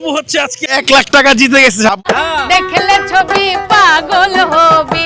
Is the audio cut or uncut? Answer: cut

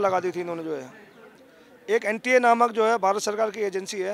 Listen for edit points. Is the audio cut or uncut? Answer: uncut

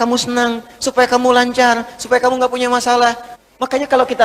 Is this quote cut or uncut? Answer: cut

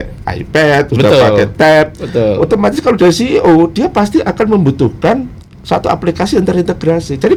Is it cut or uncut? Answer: uncut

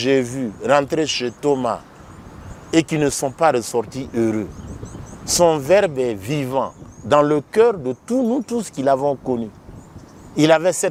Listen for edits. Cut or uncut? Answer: uncut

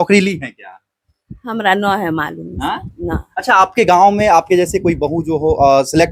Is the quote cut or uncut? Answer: uncut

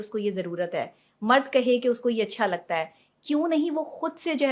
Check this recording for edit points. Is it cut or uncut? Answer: uncut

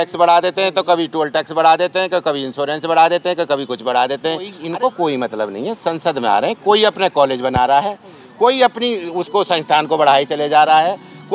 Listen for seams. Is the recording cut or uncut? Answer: cut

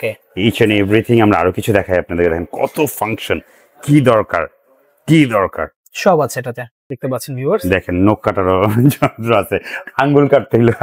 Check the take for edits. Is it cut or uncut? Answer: uncut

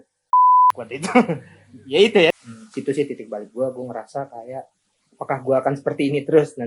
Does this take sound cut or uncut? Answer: cut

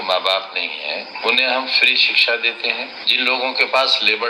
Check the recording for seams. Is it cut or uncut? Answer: cut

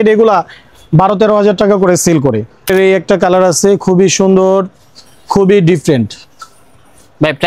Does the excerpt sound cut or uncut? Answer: cut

